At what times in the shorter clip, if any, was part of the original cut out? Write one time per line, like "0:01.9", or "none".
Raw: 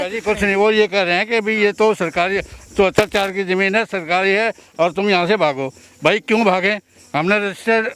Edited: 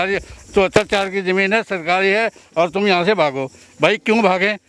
none